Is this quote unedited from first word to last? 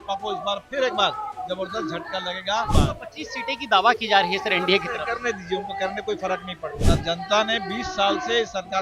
no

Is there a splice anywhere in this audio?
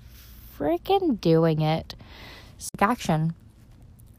yes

